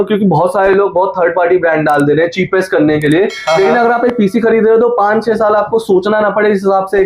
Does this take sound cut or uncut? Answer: uncut